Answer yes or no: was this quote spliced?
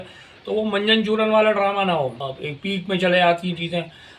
yes